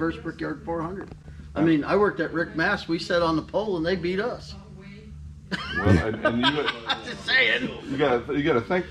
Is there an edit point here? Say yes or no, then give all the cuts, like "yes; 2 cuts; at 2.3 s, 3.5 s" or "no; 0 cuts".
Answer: no; 0 cuts